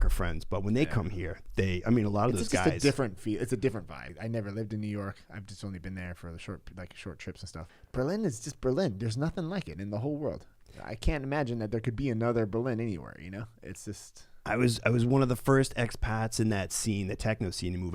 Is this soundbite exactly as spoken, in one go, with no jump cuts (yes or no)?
no